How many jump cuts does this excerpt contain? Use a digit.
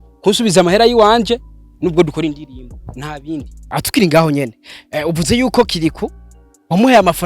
1